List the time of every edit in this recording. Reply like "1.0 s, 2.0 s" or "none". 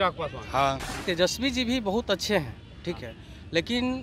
0.9 s

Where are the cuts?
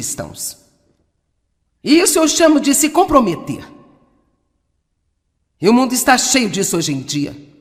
none

